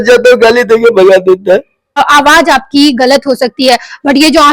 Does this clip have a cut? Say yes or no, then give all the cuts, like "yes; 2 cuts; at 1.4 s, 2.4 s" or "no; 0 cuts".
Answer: yes; 1 cut; at 2.0 s